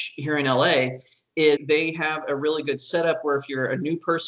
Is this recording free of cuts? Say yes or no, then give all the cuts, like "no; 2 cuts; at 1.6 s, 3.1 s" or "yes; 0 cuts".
no; 1 cut; at 1.6 s